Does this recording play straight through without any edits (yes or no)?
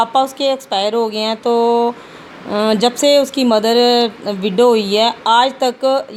yes